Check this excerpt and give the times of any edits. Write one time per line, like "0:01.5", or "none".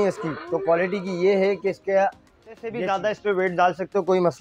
0:02.9